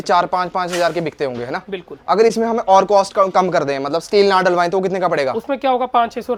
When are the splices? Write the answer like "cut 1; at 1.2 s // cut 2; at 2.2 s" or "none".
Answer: none